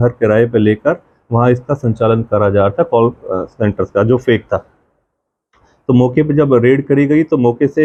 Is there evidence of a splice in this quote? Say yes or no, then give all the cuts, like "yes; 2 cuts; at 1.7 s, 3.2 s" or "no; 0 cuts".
no; 0 cuts